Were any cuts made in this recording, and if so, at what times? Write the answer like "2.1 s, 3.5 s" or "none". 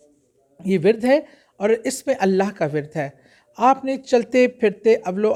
none